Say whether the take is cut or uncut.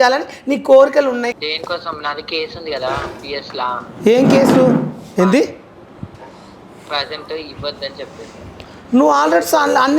cut